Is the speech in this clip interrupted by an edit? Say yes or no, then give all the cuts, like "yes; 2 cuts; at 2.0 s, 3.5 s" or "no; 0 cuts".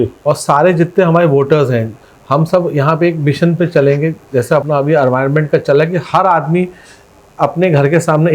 yes; 1 cut; at 4.6 s